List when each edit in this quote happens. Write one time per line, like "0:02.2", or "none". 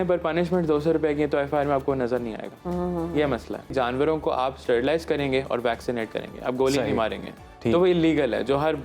0:03.7